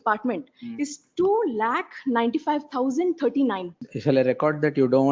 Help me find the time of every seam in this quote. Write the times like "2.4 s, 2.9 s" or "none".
3.7 s